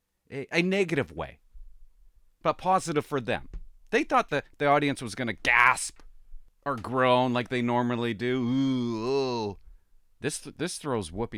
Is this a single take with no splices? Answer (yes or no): yes